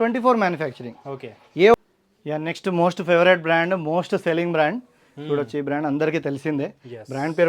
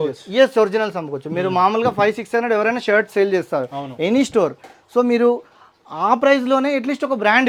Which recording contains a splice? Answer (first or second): first